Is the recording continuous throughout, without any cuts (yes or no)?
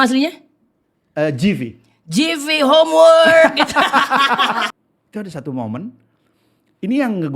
no